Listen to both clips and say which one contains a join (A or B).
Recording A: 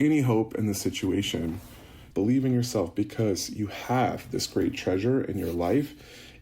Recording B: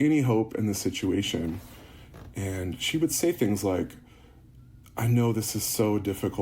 A